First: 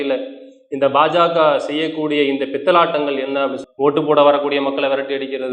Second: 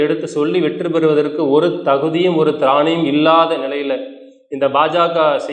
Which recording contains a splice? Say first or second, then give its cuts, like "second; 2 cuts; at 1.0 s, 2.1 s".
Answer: first; 1 cut; at 3.6 s